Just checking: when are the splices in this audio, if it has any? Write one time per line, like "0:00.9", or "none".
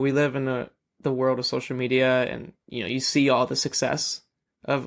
none